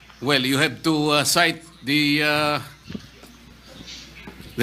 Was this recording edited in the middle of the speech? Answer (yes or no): yes